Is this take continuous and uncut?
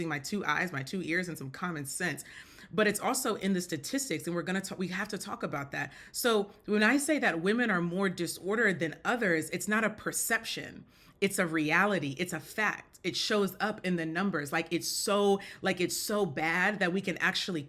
yes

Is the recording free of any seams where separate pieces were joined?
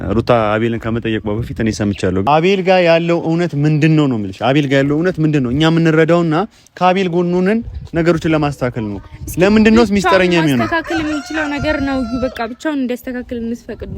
no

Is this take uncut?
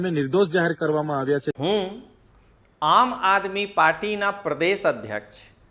no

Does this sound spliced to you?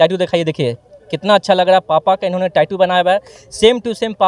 no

